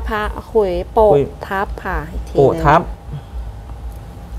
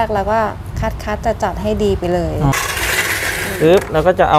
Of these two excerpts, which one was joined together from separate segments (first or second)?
second